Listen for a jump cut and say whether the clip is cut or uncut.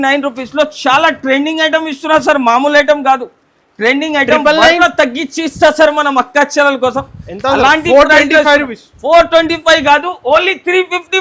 cut